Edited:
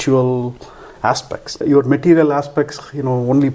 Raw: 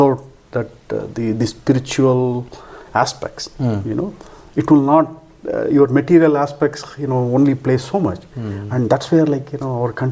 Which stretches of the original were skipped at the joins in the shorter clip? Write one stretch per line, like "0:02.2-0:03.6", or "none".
0:03.5-0:05.6